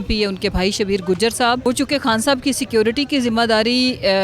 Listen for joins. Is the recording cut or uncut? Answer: cut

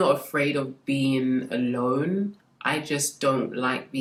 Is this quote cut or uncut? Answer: uncut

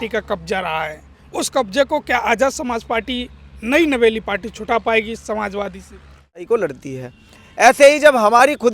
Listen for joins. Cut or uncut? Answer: cut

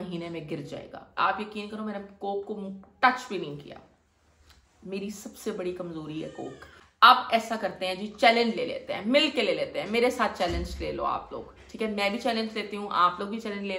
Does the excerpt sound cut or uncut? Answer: cut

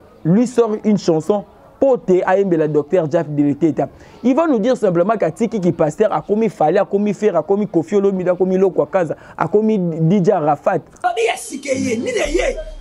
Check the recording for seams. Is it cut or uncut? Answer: cut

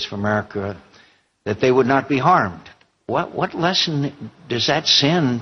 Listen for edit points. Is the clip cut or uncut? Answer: cut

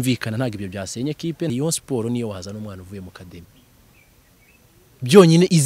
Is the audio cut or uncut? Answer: cut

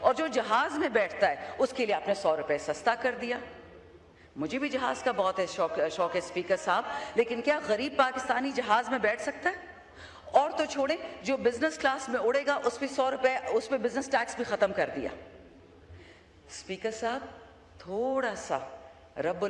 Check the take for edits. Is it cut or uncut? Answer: uncut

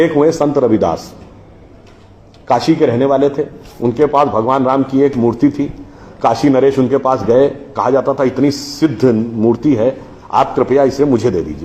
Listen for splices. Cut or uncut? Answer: uncut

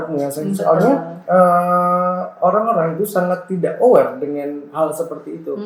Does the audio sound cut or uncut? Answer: uncut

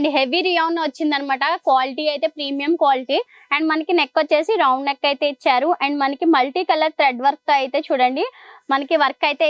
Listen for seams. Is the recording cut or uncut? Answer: uncut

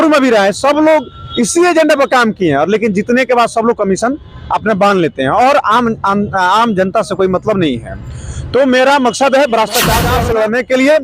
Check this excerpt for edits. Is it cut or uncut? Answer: cut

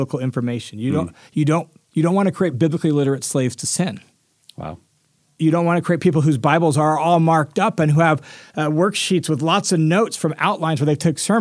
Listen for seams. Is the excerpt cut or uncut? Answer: cut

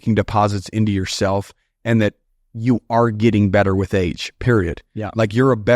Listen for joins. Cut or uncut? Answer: uncut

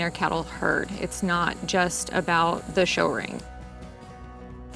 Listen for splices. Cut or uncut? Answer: uncut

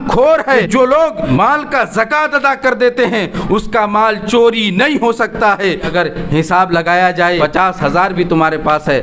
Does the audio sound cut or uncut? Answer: cut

